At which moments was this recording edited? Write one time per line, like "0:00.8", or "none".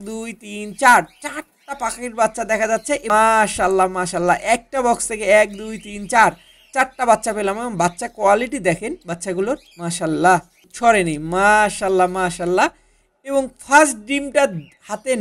0:03.0
0:10.7